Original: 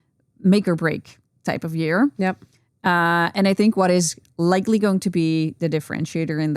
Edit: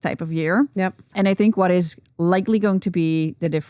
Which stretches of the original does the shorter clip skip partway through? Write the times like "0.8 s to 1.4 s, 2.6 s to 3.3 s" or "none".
2.6 s to 3.3 s